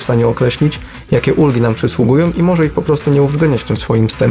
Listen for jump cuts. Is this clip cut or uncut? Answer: uncut